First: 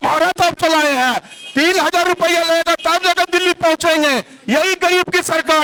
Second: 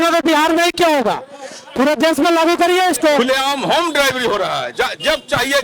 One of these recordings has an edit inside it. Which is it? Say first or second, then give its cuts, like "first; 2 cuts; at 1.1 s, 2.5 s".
second; 1 cut; at 3.2 s